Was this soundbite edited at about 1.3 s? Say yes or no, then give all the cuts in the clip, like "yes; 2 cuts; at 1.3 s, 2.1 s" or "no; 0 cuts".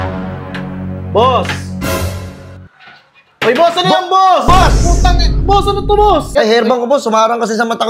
no; 1 cut; at 6.3 s